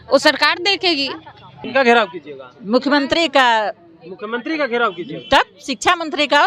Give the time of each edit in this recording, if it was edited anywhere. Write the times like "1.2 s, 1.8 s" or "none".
1.6 s

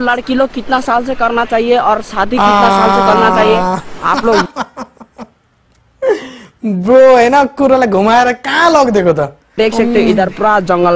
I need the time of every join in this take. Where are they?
none

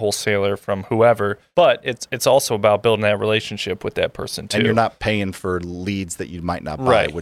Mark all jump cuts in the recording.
1.4 s

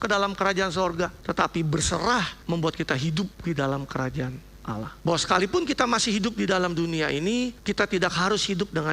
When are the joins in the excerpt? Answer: 1.2 s, 2.4 s, 3.4 s, 4.9 s, 7.6 s

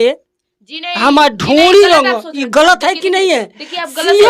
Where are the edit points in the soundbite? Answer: none

